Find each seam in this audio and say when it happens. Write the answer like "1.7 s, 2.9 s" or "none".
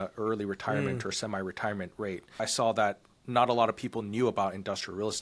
2.3 s